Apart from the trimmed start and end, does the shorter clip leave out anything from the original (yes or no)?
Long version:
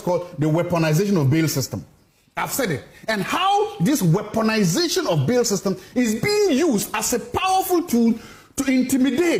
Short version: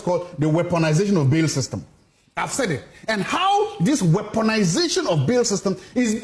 no